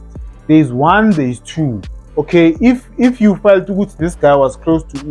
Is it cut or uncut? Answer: uncut